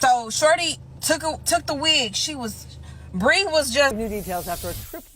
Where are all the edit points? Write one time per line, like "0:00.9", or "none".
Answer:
0:03.9